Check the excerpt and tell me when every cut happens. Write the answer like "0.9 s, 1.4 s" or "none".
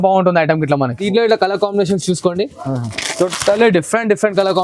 1.0 s